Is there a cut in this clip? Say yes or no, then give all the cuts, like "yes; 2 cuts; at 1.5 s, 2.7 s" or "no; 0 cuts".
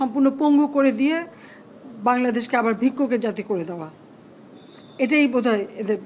no; 0 cuts